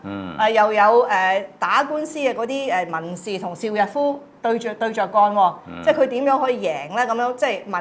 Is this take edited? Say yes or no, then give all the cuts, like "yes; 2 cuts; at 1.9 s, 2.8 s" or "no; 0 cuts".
no; 0 cuts